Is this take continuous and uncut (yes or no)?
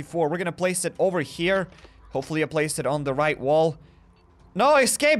yes